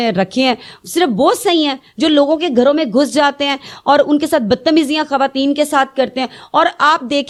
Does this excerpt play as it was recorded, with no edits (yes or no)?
yes